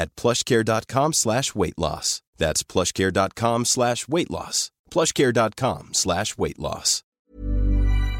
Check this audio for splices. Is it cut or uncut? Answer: cut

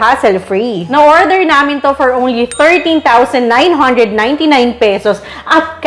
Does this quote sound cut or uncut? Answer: uncut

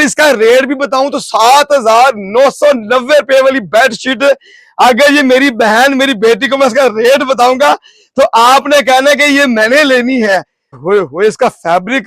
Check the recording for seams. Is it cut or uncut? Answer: cut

